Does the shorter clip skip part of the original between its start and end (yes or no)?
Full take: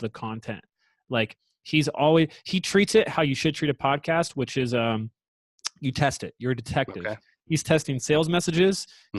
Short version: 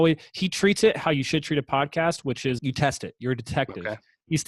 yes